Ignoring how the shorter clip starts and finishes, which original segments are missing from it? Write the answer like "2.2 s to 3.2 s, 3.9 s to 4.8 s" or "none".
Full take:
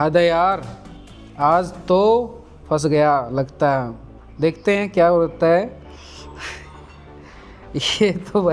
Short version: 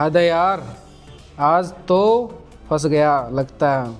none